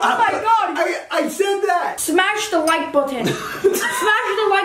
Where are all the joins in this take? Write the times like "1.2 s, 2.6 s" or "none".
1.9 s